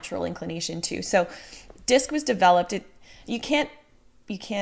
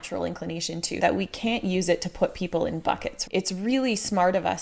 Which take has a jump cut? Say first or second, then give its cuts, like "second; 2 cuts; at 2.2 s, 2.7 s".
second; 2 cuts; at 1.0 s, 3.2 s